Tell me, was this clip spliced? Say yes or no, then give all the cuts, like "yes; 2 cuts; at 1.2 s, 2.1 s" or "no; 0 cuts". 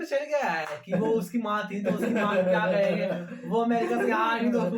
no; 0 cuts